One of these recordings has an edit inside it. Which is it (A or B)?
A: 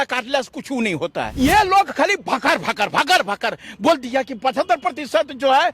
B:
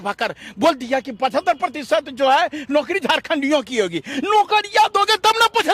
A